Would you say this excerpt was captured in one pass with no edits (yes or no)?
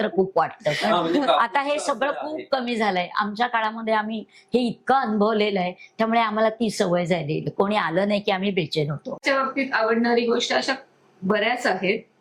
no